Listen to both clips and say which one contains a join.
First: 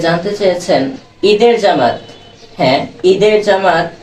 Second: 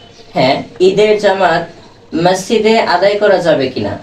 first; 1 cut; at 1.0 s

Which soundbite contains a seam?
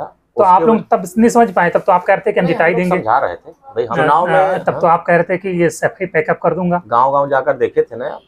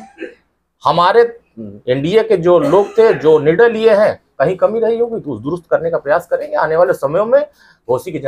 first; 1 cut; at 3.9 s

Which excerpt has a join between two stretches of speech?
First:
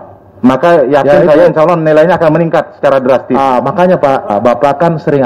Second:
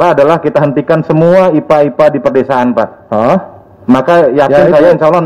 first; 1 cut; at 4.3 s

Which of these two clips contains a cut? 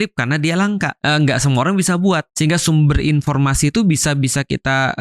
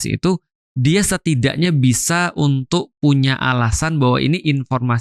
first; 2 cuts; at 1.0 s, 2.3 s

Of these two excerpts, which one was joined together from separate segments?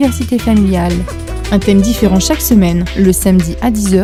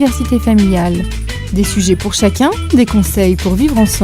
second; 1 cut; at 0.9 s

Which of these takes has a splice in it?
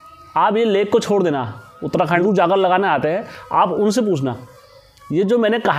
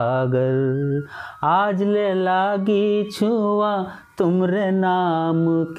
first; 1 cut; at 2.2 s

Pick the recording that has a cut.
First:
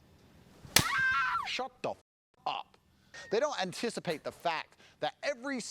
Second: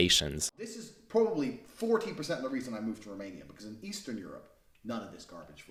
first; 1 cut; at 3.1 s

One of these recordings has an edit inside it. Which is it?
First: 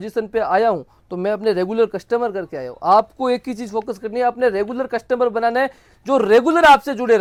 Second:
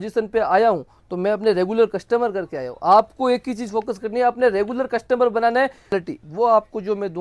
second; 1 cut; at 6.0 s

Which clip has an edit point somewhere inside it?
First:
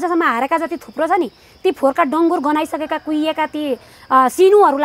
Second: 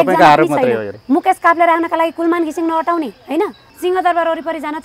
second; 2 cuts; at 0.9 s, 3.6 s

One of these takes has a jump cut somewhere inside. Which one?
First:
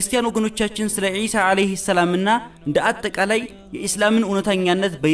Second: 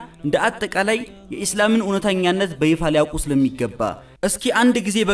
second; 1 cut; at 4.1 s

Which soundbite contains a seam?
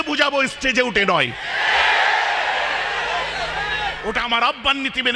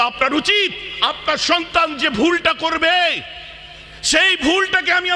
first; 1 cut; at 4.0 s

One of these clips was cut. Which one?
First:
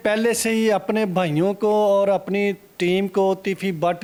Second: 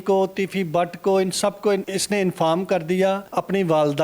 second; 2 cuts; at 1.9 s, 3.2 s

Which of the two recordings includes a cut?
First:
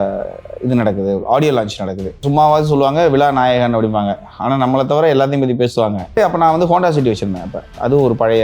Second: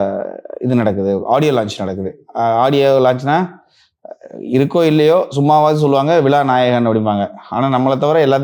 first; 2 cuts; at 2.2 s, 6.2 s

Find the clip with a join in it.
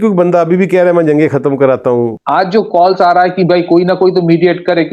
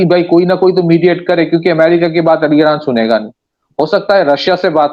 first; 1 cut; at 2.1 s

